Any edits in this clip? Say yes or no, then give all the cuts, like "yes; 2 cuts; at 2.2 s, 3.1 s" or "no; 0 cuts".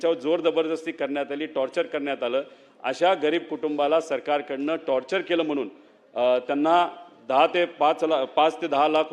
no; 0 cuts